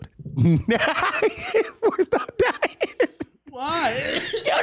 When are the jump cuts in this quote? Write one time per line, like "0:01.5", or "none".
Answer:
none